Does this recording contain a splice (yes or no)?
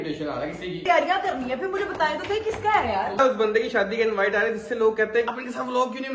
yes